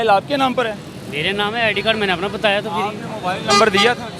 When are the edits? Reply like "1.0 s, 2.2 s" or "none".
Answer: none